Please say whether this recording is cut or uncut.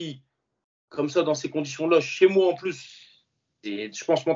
uncut